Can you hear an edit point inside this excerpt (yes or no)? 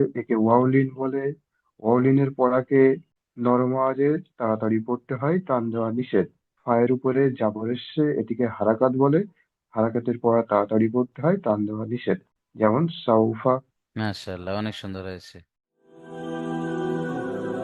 yes